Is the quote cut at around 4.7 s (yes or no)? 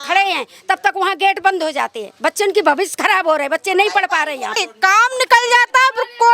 yes